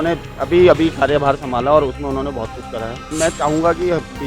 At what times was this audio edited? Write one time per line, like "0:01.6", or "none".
0:03.1